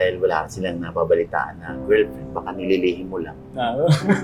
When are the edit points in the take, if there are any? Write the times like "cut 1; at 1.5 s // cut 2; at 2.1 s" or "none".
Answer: none